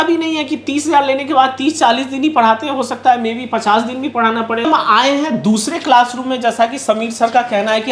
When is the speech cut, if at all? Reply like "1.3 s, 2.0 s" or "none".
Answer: 4.7 s